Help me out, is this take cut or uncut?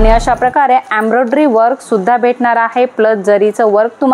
uncut